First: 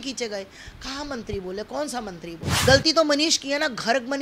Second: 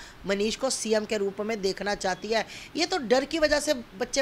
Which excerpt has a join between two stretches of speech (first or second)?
first